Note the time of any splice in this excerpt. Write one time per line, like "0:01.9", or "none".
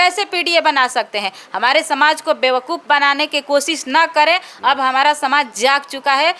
none

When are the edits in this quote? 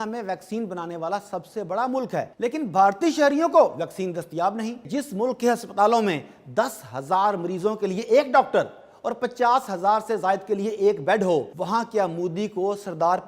0:02.3
0:04.8
0:11.6

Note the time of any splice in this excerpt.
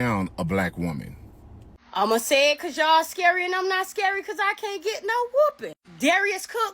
0:01.3

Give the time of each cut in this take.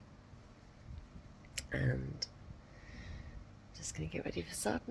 none

